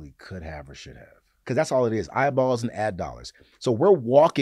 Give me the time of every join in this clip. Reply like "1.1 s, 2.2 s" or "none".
1.3 s